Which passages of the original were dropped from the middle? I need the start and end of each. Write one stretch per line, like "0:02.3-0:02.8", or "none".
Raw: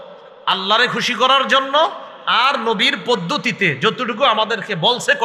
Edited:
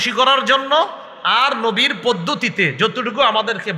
none